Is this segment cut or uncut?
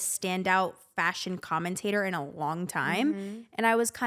uncut